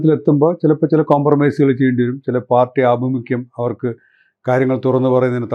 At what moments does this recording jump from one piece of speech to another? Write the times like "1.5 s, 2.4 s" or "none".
none